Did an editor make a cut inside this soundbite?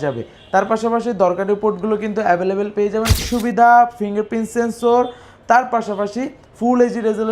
yes; 1 cut; at 3.1 s

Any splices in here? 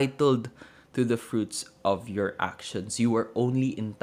no; 0 cuts

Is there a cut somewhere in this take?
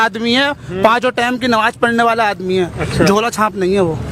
no; 0 cuts

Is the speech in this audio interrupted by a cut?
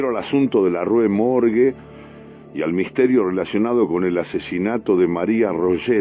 yes; 1 cut; at 1.0 s

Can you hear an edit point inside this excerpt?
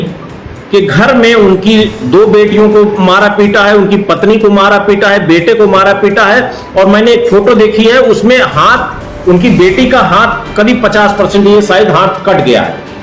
no; 0 cuts

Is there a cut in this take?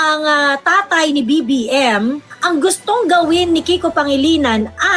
yes; 1 cut; at 2.3 s

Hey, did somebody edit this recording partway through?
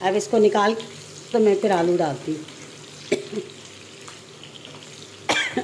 no; 0 cuts

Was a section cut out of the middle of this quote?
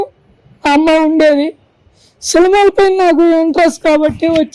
no; 0 cuts

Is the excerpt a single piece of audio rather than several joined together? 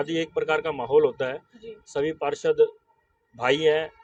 yes; 0 cuts

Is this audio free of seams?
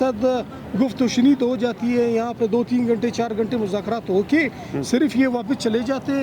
yes; 0 cuts

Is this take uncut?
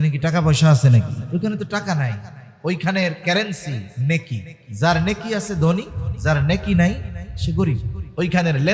no; 2 cuts; at 1.2 s, 3.9 s

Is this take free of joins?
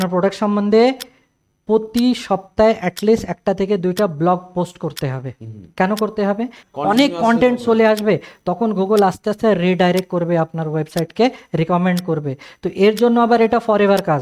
no; 1 cut; at 6.6 s

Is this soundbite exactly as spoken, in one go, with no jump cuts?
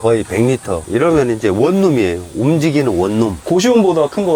no; 1 cut; at 3.4 s

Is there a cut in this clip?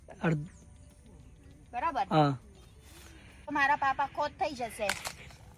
yes; 1 cut; at 3.5 s

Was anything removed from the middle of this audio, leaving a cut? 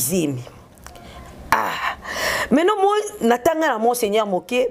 no; 0 cuts

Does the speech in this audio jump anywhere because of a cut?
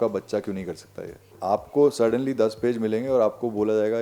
yes; 1 cut; at 1.4 s

